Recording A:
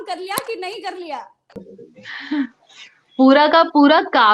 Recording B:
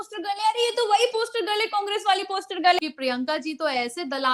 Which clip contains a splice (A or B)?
B